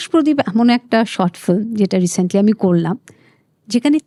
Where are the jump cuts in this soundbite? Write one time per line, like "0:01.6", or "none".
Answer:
none